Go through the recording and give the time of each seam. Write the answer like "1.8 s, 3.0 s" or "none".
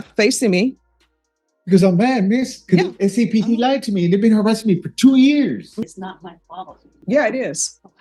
5.8 s